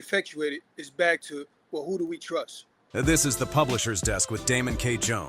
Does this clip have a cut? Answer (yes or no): yes